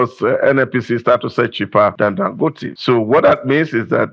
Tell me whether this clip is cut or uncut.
cut